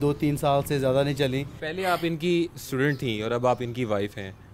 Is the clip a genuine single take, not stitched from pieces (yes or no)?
no